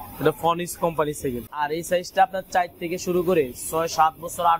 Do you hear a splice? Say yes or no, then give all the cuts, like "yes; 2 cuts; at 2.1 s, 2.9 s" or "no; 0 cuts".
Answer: yes; 1 cut; at 1.5 s